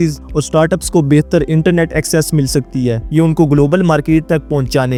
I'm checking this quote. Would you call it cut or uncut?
uncut